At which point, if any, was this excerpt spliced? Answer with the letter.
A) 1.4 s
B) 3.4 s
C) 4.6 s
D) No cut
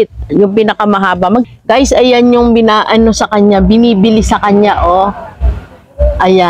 A